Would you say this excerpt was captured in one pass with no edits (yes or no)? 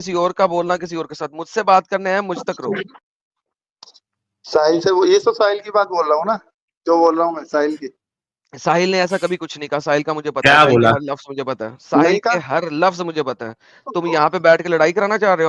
yes